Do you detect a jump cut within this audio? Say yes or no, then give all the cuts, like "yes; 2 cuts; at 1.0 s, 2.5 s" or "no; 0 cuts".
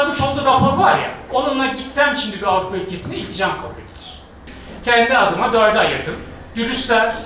no; 0 cuts